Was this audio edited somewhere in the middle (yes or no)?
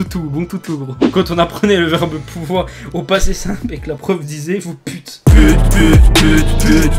yes